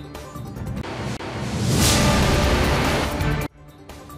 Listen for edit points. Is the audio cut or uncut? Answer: cut